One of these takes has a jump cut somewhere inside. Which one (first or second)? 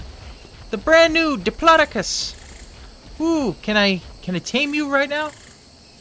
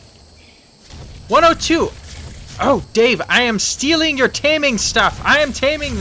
second